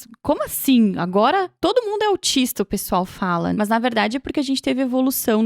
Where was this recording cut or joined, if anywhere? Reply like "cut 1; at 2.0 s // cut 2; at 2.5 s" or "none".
cut 1; at 3.5 s